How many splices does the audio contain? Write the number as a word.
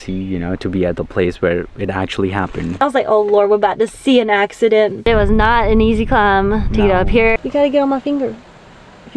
three